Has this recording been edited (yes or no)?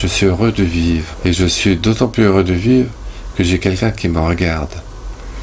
yes